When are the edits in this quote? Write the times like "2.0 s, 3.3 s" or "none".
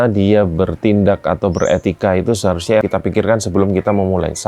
2.8 s